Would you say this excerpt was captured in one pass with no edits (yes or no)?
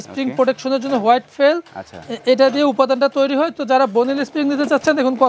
yes